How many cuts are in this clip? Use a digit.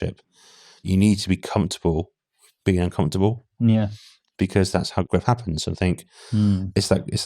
2